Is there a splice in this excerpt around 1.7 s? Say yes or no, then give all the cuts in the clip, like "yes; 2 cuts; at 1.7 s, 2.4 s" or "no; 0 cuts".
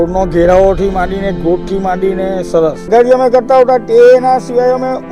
no; 1 cut; at 2.9 s